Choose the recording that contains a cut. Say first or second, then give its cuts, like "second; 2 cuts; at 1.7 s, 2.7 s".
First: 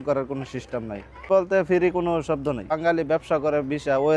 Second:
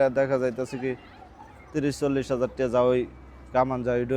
first; 2 cuts; at 1.3 s, 2.8 s